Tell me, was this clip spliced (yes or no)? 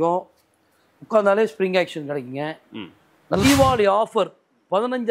yes